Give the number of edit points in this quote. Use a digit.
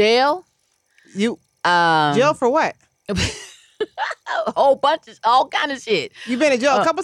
0